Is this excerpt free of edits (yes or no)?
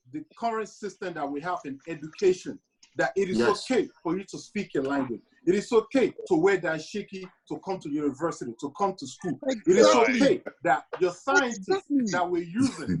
yes